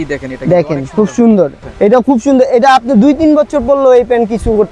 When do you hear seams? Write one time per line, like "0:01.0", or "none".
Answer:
0:01.6